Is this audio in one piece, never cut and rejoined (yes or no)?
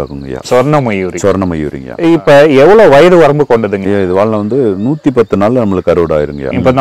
no